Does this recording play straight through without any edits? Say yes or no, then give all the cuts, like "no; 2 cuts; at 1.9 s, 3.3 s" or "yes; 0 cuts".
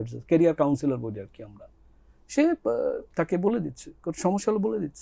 yes; 0 cuts